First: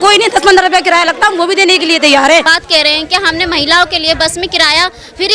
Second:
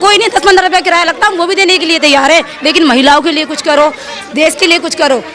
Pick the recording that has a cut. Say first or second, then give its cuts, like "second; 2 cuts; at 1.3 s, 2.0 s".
first; 1 cut; at 2.5 s